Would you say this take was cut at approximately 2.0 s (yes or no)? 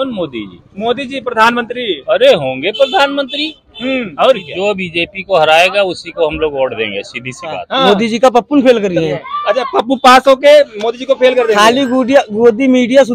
no